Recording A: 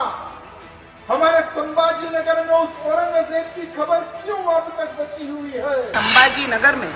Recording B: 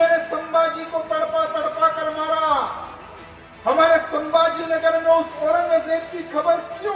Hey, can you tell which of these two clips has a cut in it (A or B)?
A